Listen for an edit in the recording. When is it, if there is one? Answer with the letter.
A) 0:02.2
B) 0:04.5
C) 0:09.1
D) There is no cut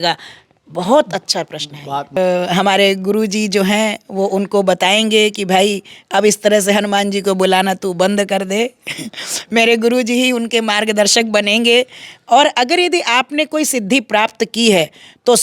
A